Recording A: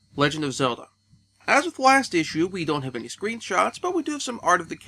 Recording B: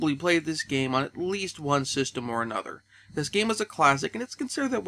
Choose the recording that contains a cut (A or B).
A